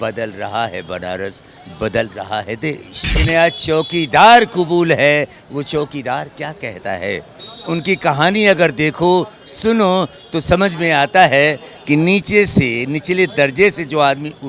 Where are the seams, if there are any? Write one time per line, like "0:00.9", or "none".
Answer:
0:03.1